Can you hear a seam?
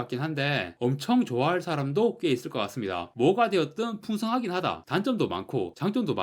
yes; 1 cut; at 3.1 s

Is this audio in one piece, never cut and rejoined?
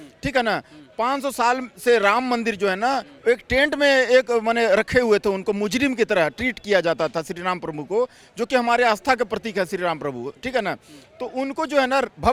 yes; 0 cuts

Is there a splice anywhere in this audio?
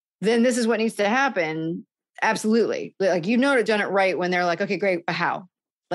yes; 1 cut; at 3.7 s

